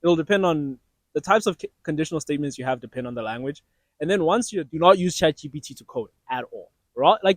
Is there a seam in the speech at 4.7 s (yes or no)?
yes